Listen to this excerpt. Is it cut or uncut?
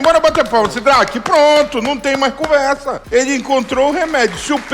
cut